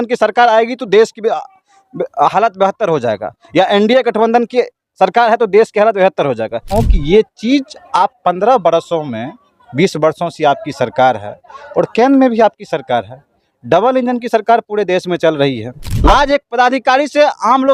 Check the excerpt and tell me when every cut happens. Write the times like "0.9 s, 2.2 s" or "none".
6.7 s, 15.8 s